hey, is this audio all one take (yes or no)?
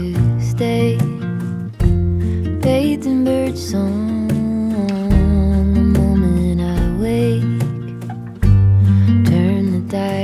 yes